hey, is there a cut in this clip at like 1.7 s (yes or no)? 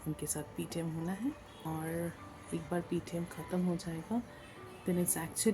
yes